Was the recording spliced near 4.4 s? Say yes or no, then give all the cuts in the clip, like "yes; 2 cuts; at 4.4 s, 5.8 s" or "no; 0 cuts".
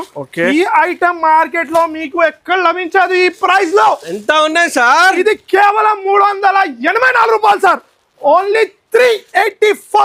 no; 0 cuts